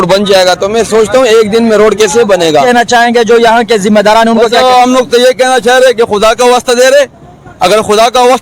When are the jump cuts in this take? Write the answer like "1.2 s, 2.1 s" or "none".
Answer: 2.6 s